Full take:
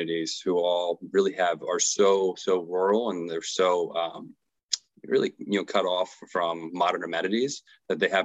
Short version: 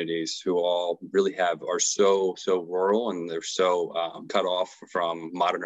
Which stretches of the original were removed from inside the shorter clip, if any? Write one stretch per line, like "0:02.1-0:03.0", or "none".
0:04.3-0:05.7